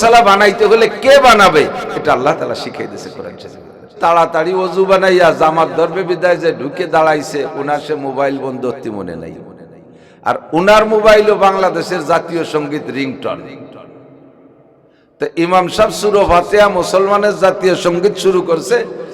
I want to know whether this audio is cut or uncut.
cut